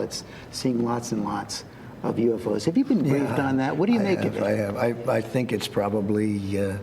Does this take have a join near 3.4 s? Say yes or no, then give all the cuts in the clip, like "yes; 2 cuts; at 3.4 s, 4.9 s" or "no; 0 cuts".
no; 1 cut; at 5.0 s